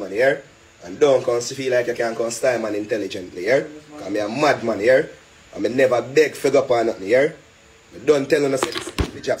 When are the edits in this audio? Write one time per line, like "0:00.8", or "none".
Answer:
none